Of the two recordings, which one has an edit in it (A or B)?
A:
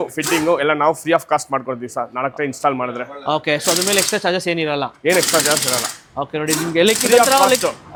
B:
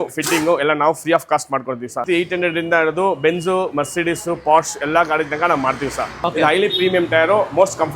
B